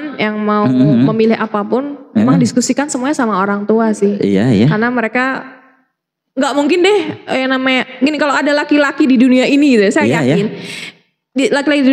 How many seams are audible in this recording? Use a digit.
0